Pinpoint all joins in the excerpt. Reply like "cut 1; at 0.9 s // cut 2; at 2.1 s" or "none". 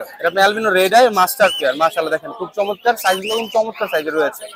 none